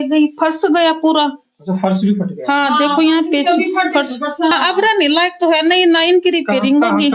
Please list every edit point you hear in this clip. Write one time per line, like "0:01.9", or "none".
0:04.5